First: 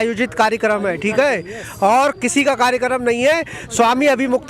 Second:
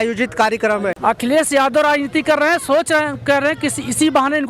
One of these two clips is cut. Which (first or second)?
second